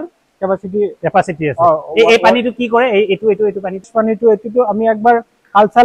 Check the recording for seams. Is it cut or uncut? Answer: uncut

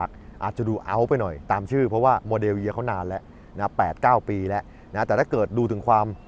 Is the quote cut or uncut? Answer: uncut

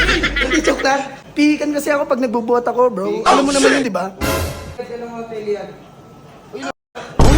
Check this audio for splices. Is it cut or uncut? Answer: cut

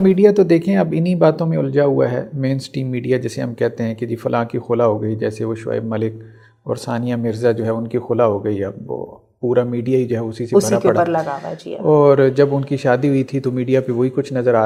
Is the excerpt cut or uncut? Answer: uncut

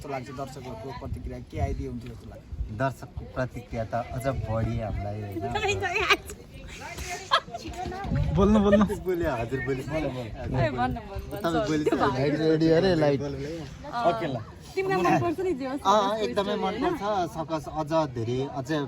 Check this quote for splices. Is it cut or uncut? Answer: uncut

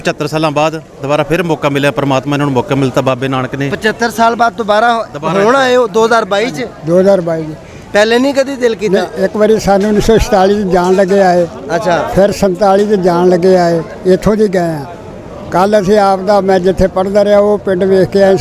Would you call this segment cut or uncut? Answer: uncut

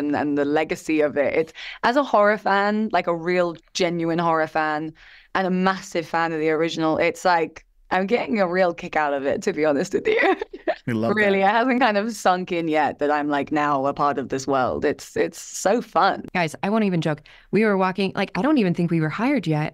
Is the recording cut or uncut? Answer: cut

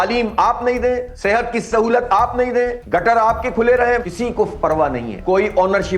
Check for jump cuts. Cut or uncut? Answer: cut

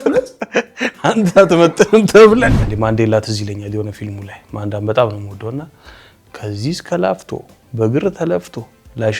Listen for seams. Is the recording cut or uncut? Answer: cut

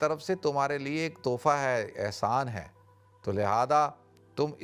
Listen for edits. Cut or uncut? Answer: uncut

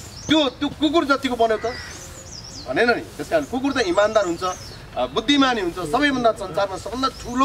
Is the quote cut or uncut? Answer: uncut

